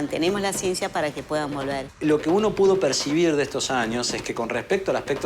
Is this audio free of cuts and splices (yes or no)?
no